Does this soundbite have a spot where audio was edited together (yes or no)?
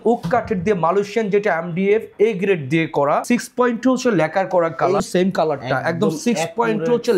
yes